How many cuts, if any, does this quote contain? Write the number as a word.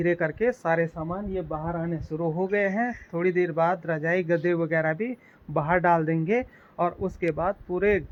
zero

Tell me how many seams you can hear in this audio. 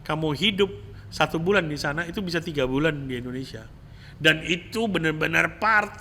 zero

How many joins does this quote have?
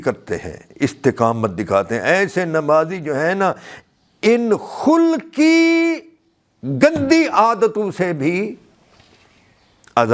zero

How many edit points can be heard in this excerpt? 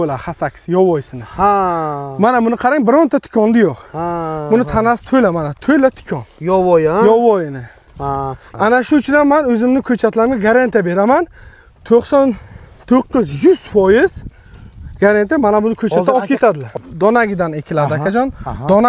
two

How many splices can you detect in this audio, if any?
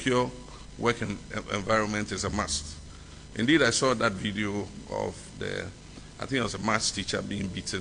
zero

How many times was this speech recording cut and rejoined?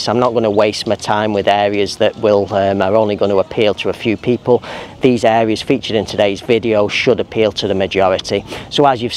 zero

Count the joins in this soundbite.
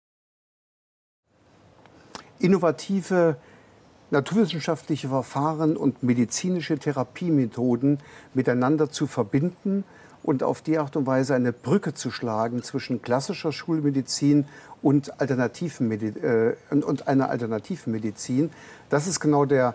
zero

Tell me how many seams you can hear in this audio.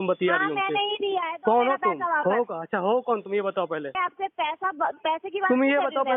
one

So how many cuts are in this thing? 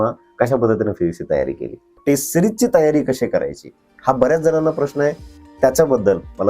one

